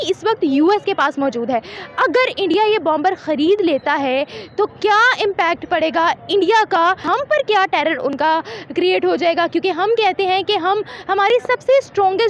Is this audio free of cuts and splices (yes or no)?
yes